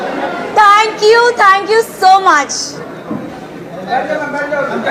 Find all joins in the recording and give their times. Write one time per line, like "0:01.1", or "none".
none

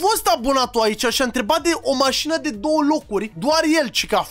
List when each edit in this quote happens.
none

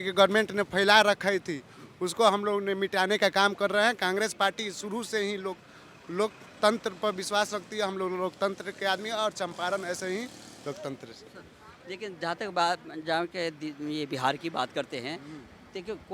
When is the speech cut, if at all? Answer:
none

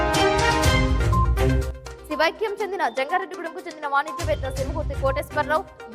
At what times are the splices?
0:01.5

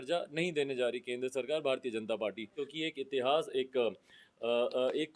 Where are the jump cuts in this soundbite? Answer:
0:02.6

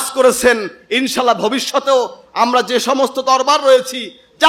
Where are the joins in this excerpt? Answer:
none

